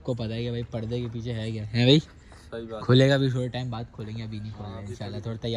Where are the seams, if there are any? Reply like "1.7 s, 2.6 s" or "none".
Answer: none